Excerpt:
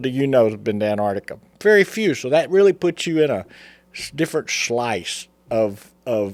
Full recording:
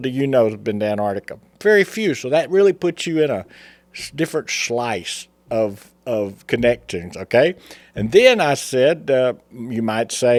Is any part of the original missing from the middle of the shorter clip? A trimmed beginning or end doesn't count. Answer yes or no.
no